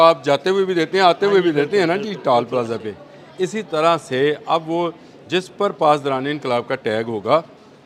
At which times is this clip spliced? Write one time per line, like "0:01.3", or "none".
none